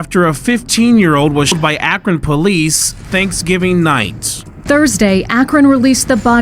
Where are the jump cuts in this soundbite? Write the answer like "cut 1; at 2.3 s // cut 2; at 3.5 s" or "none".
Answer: cut 1; at 1.6 s